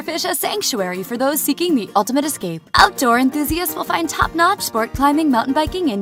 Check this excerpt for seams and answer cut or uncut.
uncut